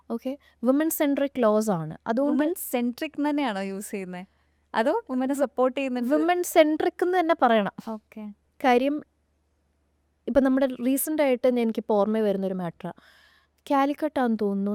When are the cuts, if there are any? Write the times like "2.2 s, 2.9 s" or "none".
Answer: none